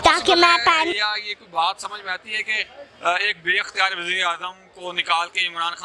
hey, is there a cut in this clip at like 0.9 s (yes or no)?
yes